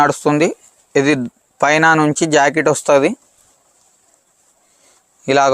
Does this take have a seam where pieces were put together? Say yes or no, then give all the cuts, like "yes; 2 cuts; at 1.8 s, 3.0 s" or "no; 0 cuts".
no; 0 cuts